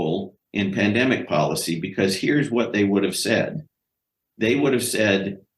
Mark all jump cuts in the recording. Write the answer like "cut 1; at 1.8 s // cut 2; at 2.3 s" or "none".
none